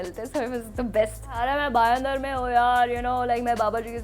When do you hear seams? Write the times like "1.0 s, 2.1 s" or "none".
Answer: 1.3 s